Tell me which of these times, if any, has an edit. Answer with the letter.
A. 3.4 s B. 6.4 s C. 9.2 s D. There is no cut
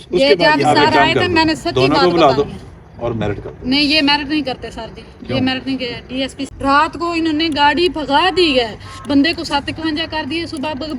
B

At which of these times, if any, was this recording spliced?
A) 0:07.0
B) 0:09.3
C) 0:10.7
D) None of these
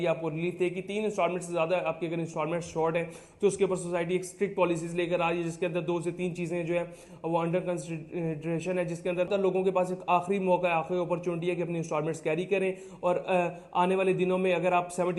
B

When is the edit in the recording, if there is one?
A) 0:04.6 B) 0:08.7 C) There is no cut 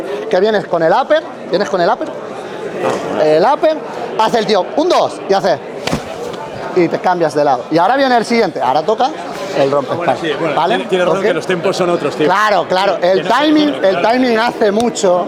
C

